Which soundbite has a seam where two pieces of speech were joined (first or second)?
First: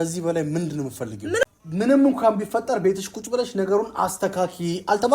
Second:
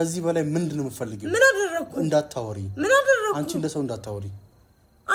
first